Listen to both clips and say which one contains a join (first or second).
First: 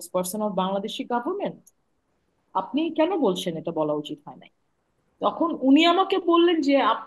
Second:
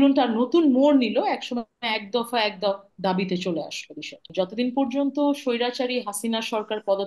second